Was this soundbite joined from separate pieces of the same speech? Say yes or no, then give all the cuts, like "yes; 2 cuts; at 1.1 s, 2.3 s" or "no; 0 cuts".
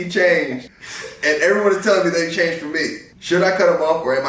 no; 0 cuts